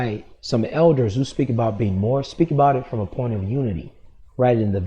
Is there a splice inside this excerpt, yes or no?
no